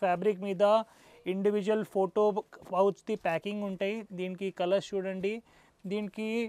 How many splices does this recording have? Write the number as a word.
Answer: zero